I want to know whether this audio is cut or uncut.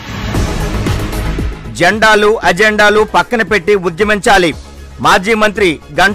uncut